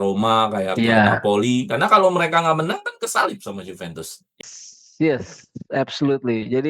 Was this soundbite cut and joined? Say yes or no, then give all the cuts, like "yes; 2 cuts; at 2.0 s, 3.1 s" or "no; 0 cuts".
yes; 1 cut; at 4.4 s